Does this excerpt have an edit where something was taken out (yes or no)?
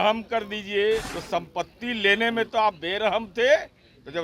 yes